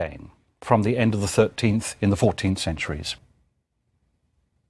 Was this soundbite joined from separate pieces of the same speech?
no; 0 cuts

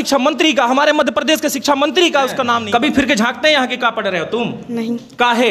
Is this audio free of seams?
no; 1 cut; at 2.6 s

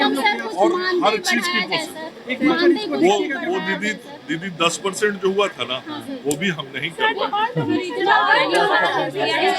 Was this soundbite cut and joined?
no; 0 cuts

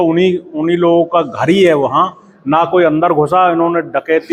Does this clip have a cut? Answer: no; 0 cuts

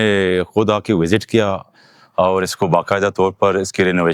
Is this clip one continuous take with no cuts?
yes; 0 cuts

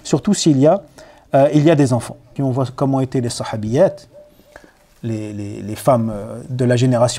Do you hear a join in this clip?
yes; 1 cut; at 2.3 s

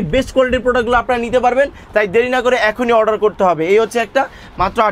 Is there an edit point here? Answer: no; 0 cuts

